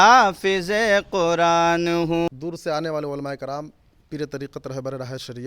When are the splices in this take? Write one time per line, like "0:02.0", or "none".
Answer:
0:02.3